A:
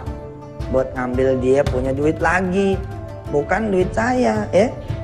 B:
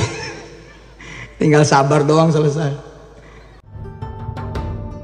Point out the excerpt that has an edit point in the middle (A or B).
B